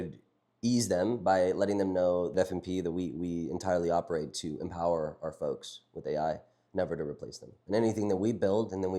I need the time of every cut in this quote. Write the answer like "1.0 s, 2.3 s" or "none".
2.3 s